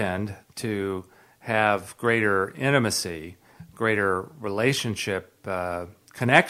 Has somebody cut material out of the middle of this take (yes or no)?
no